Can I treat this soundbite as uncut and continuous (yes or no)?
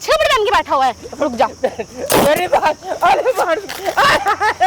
yes